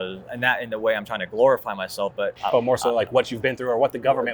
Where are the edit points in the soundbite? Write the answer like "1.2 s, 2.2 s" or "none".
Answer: 2.4 s